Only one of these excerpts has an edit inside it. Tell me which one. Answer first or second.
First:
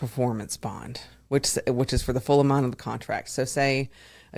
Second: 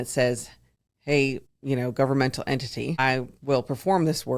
second